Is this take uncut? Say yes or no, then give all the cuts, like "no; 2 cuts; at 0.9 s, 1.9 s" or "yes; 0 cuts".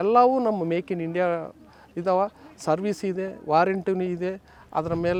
yes; 0 cuts